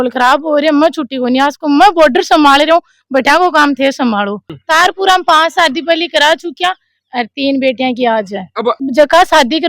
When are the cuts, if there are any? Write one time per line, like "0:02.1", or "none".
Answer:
0:04.5
0:08.8

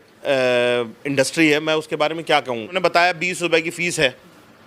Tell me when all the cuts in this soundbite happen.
0:02.8

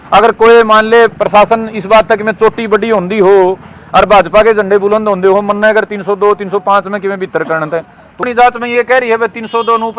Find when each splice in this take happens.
0:08.2

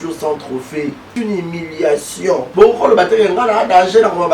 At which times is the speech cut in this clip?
0:01.1
0:02.5

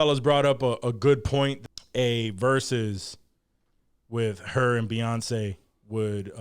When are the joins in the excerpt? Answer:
0:01.6

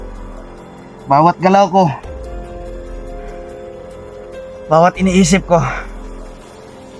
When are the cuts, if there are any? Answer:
0:01.0

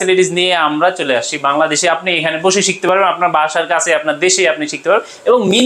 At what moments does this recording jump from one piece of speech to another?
none

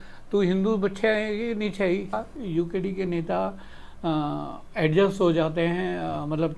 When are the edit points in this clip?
0:02.2

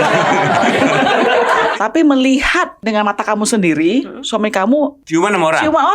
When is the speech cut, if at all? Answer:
0:01.7
0:02.8
0:05.0

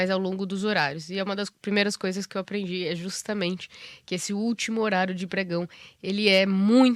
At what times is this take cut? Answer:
none

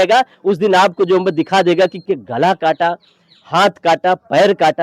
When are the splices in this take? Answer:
0:02.1

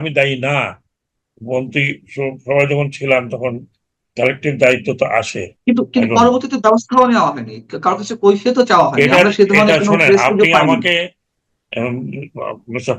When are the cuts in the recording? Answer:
0:05.5

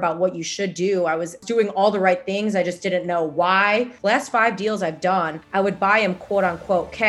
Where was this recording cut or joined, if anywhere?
0:01.4
0:03.9
0:05.4

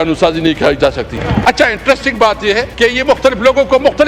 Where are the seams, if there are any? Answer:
0:01.3
0:02.7

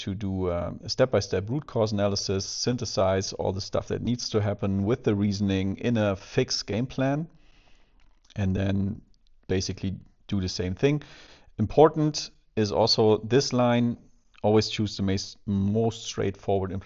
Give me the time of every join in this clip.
none

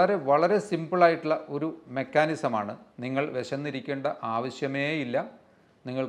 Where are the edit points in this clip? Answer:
0:02.9

